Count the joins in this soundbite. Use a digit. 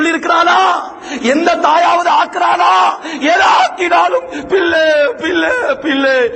0